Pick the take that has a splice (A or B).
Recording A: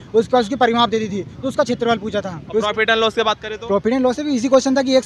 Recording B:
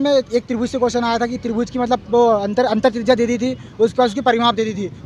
A